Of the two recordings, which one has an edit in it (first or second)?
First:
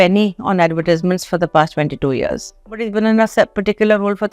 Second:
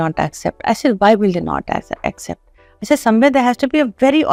first